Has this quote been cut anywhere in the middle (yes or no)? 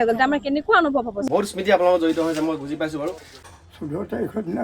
yes